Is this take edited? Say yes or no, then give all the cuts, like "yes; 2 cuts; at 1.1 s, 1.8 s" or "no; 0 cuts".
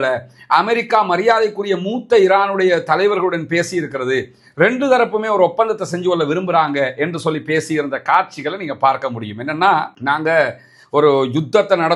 no; 0 cuts